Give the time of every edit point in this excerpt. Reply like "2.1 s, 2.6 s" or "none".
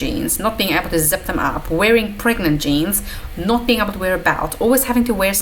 none